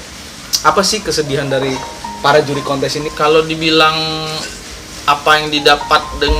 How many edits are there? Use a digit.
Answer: 1